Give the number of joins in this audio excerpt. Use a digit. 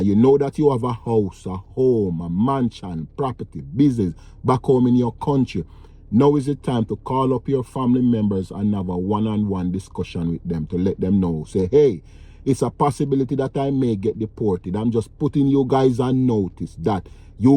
0